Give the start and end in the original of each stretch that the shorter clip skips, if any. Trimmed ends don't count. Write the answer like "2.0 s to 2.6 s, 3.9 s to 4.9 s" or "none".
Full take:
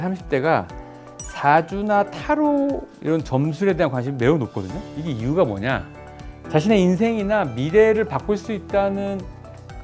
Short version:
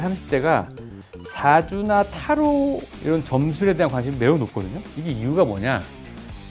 none